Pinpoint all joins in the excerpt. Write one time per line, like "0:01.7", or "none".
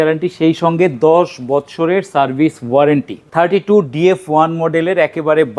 0:03.3